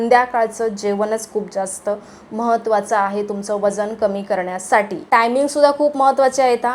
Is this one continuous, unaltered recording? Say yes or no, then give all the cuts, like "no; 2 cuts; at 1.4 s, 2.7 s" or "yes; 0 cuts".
no; 1 cut; at 5.0 s